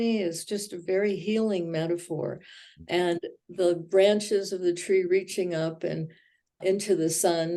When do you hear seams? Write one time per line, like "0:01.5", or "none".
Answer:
0:06.6